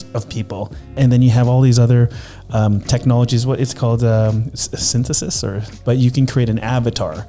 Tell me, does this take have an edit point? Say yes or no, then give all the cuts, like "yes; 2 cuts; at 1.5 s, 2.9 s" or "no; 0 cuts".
yes; 2 cuts; at 0.9 s, 5.7 s